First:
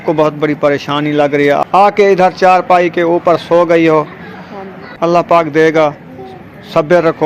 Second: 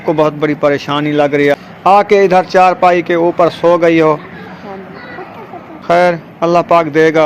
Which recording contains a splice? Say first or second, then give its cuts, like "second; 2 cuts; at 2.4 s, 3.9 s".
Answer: first; 2 cuts; at 1.8 s, 4.9 s